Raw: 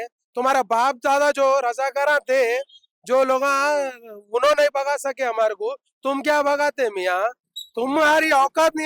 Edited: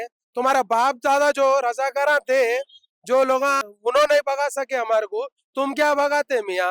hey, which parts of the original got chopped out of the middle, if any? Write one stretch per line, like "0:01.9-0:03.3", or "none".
0:03.6-0:04.1